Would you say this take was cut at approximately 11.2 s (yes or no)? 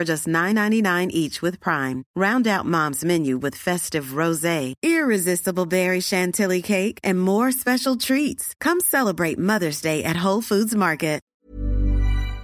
yes